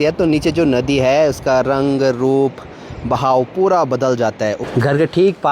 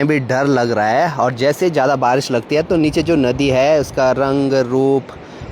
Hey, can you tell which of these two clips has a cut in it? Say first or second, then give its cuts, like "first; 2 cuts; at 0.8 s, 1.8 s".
first; 1 cut; at 4.6 s